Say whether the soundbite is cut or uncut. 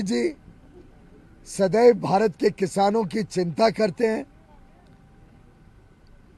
uncut